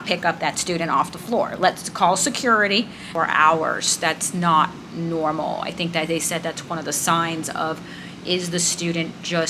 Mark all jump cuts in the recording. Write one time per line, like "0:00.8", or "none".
0:03.1

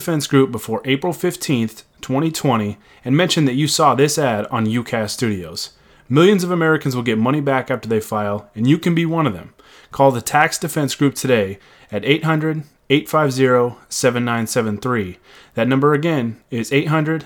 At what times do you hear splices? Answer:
none

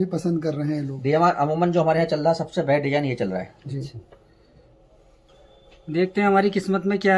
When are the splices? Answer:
0:05.2

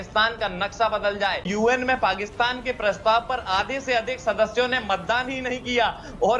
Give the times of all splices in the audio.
0:01.5

